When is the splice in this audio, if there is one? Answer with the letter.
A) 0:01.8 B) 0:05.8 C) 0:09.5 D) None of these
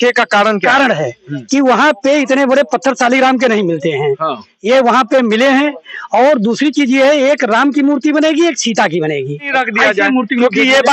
C